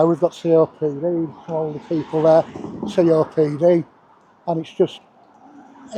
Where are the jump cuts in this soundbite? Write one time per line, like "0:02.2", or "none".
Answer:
none